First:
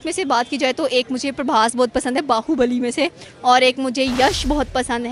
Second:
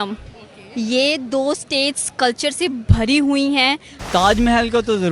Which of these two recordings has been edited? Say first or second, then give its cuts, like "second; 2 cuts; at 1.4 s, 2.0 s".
second; 1 cut; at 4.0 s